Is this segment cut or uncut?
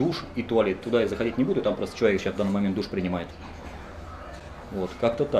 uncut